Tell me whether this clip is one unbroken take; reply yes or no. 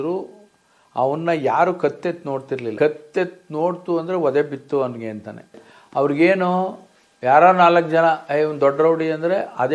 no